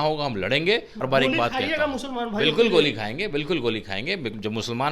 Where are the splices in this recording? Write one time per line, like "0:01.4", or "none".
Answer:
0:01.0